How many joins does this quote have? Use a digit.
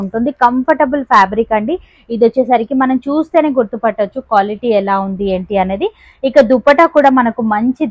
0